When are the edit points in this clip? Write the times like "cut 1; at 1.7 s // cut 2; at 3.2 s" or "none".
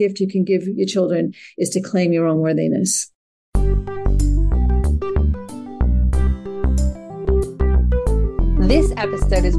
cut 1; at 3.3 s